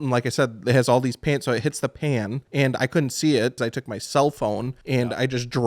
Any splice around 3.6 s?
yes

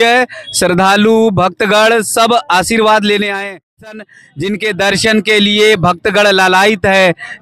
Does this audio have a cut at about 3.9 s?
yes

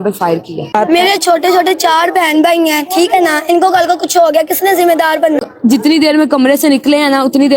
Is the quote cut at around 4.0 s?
no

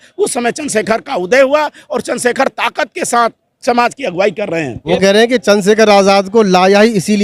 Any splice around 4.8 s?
yes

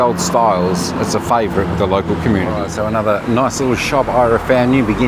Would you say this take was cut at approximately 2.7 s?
no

